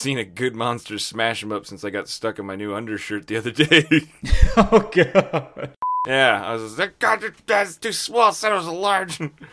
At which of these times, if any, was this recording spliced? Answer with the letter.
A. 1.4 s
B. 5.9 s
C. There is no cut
B